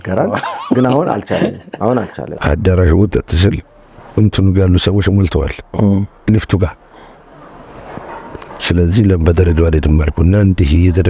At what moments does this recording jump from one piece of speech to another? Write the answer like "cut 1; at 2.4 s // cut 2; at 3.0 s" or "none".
cut 1; at 2.2 s